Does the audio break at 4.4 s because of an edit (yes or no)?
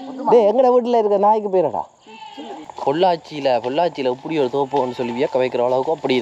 no